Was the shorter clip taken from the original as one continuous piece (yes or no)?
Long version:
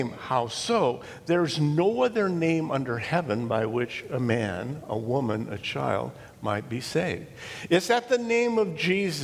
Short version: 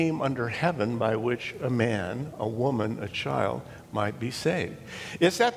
yes